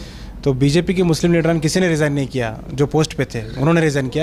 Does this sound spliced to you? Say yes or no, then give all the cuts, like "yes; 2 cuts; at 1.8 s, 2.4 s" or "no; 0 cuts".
no; 0 cuts